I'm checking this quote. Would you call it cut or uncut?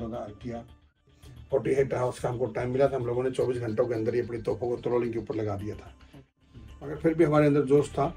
cut